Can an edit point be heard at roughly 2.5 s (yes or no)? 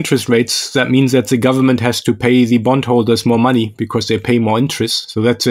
no